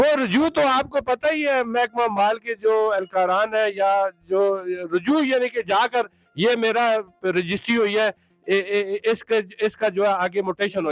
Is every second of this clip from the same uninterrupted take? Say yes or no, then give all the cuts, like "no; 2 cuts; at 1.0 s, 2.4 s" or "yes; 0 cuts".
yes; 0 cuts